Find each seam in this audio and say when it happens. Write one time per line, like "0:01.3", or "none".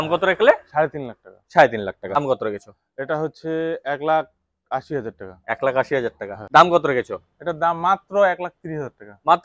0:02.2
0:06.3